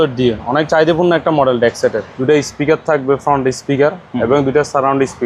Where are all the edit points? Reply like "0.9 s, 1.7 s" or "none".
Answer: 2.1 s